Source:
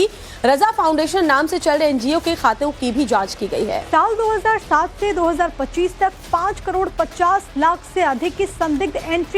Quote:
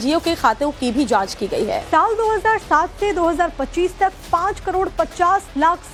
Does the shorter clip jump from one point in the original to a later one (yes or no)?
no